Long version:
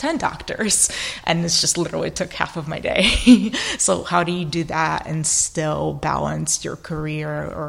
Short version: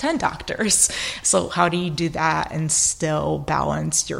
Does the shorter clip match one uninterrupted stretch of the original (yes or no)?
no